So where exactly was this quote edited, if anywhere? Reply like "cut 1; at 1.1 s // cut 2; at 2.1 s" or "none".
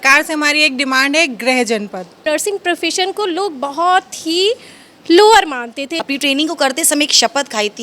cut 1; at 2.2 s // cut 2; at 5.9 s